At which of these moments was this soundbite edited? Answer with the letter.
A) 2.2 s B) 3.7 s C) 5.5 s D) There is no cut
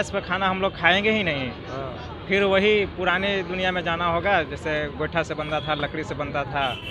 D